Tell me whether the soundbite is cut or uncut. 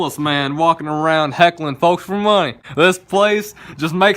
cut